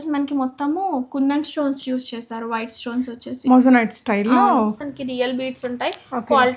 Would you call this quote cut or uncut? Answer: cut